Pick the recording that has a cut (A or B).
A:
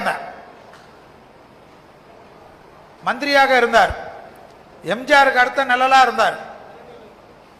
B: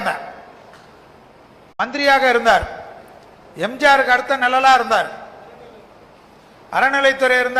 B